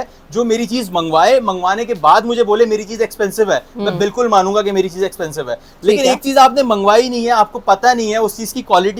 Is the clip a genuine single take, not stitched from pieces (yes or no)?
yes